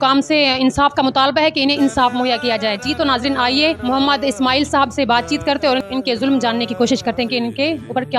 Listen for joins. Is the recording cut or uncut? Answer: uncut